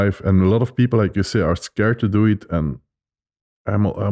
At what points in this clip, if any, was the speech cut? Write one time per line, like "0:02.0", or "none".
none